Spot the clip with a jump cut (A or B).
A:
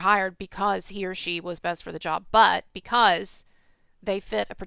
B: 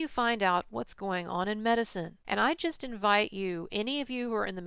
B